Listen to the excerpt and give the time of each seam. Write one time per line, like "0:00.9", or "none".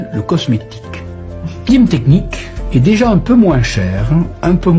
0:01.7

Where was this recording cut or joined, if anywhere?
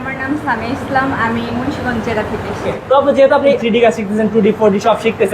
0:02.7
0:03.6

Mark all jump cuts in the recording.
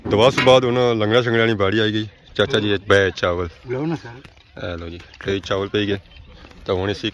none

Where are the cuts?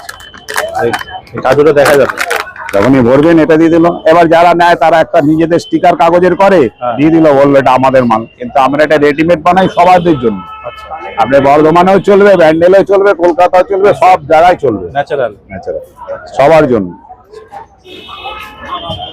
none

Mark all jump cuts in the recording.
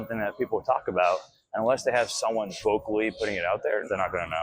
0:02.5

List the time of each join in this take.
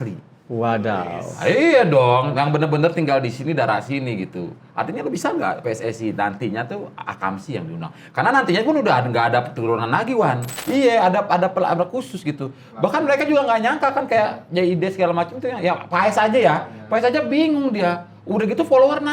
0:10.5

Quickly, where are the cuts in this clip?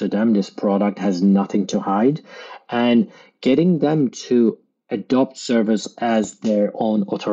none

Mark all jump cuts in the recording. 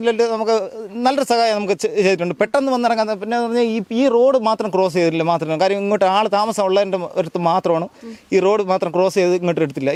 none

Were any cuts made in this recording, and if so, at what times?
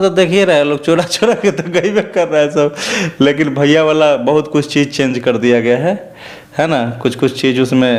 none

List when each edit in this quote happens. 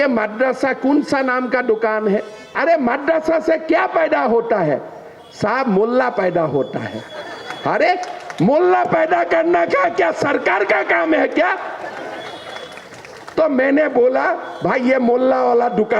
0:02.6

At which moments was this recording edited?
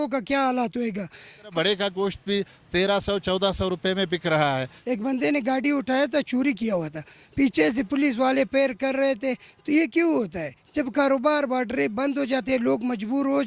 0:01.5
0:04.7

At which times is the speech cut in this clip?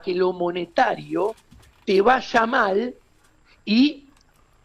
none

